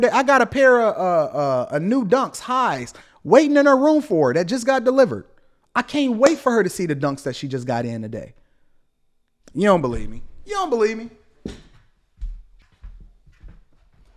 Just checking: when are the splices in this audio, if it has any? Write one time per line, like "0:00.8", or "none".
0:12.6

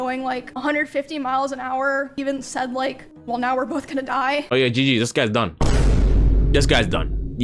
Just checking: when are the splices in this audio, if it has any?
0:02.2
0:03.1
0:04.5

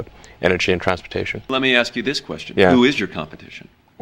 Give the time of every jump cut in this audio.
0:01.4

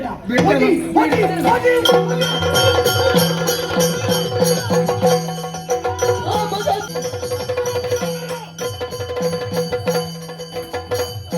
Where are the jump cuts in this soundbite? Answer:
0:06.9

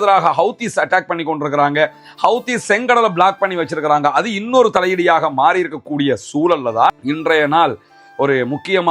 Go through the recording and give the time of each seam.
0:07.0

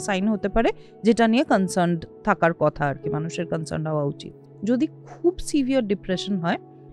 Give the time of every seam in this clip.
0:04.4

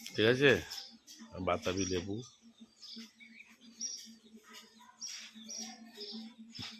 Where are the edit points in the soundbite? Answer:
none

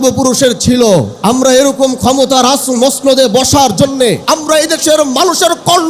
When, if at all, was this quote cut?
0:01.1
0:04.2

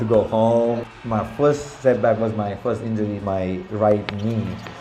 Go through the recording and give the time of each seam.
0:00.8
0:03.2

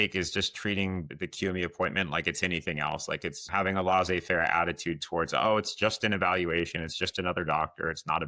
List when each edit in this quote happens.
0:01.1
0:03.5

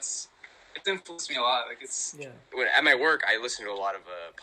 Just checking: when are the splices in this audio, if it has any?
0:02.4

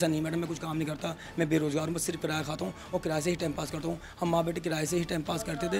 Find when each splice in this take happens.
none

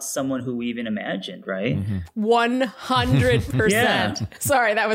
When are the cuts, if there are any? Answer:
0:02.1

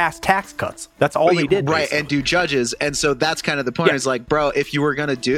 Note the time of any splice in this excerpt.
none

